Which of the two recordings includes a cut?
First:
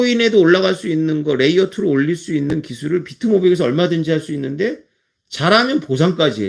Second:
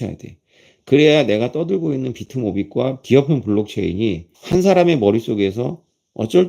second; 2 cuts; at 3.0 s, 4.3 s

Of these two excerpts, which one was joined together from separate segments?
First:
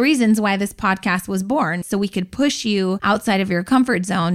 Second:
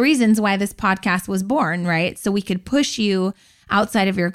first; 2 cuts; at 1.8 s, 3.0 s

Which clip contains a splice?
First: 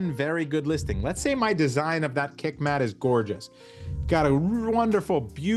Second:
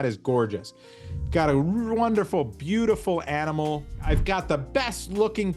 second; 1 cut; at 4.0 s

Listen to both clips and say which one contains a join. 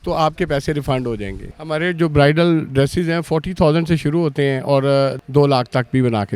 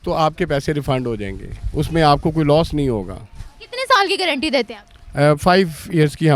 first; 2 cuts; at 1.5 s, 5.2 s

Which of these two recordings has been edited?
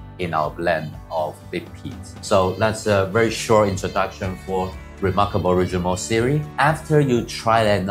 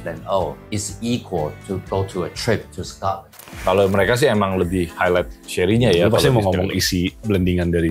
second; 1 cut; at 3.5 s

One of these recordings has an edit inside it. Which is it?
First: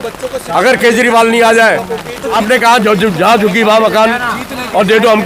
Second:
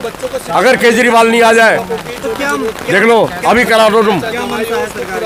first; 1 cut; at 2.3 s

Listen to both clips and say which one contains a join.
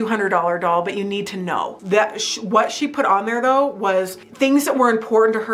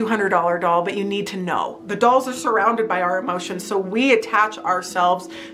second; 1 cut; at 1.8 s

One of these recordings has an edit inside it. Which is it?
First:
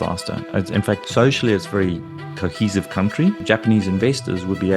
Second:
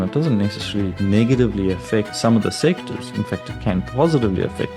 first; 2 cuts; at 1.0 s, 3.4 s

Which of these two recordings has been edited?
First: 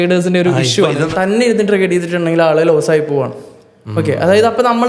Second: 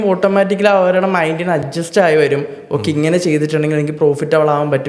first; 1 cut; at 1.1 s

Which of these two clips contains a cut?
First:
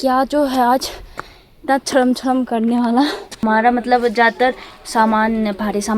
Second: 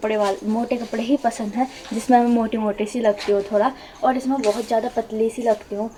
first; 1 cut; at 3.4 s

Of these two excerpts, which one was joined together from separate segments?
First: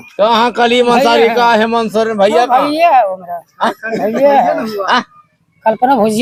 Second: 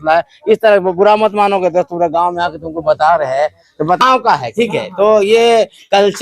second; 1 cut; at 4.0 s

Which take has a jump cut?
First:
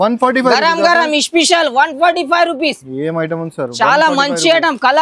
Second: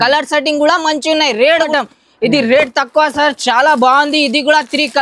second; 1 cut; at 1.7 s

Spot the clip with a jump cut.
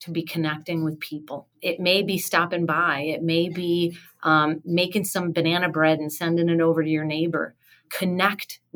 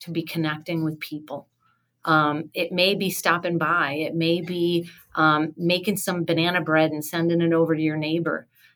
first; 2 cuts; at 1.6 s, 7.9 s

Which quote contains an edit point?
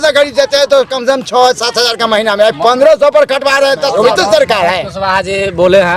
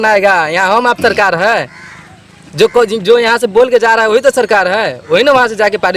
first; 1 cut; at 3.9 s

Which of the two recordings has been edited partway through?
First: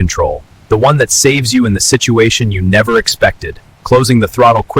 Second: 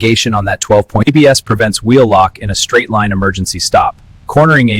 second; 1 cut; at 1.0 s

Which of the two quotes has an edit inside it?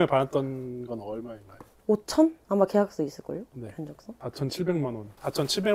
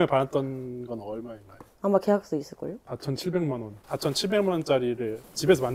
second; 2 cuts; at 1.7 s, 2.8 s

